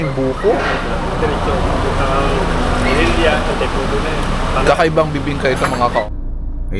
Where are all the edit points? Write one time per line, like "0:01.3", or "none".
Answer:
0:05.9

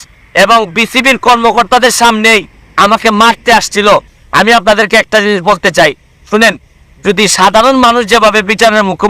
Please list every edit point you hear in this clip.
0:04.1

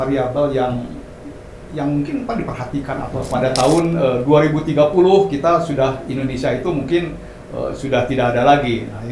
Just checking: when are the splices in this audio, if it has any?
0:03.1

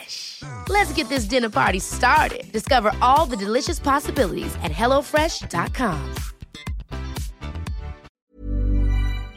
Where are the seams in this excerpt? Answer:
0:08.1

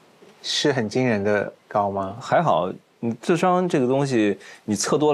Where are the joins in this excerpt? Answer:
0:02.2

